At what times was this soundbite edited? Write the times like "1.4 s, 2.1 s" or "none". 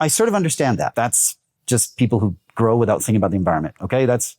0.9 s